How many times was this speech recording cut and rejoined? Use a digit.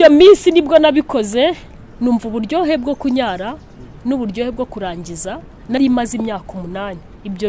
1